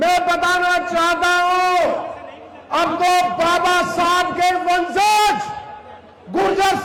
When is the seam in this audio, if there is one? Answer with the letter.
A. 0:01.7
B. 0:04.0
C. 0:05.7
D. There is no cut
D